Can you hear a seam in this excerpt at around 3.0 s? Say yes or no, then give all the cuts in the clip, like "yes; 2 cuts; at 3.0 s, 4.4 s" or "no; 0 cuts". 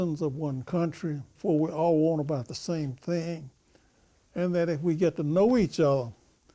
no; 1 cut; at 1.3 s